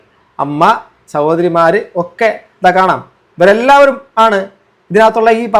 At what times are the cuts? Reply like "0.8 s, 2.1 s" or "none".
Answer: none